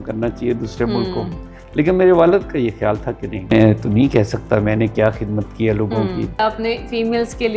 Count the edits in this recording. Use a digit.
2